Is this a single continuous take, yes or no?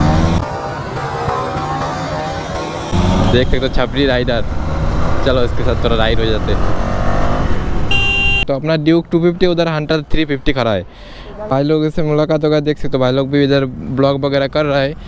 no